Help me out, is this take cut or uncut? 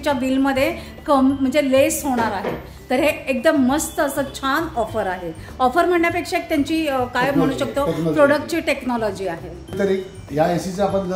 uncut